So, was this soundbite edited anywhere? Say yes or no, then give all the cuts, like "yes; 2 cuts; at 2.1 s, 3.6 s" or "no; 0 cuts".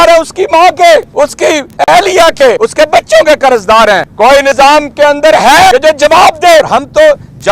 yes; 5 cuts; at 1.5 s, 2.6 s, 4.3 s, 5.7 s, 6.7 s